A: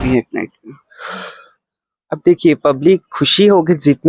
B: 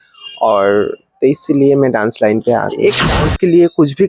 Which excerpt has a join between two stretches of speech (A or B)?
B